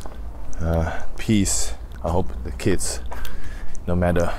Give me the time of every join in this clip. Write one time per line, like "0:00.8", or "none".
0:01.8